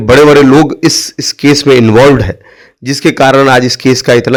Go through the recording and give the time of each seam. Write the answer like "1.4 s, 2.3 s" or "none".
none